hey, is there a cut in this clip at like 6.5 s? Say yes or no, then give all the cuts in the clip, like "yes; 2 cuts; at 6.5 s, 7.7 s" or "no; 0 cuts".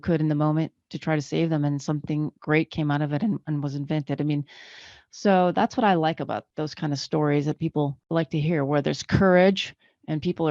yes; 2 cuts; at 6.5 s, 8.0 s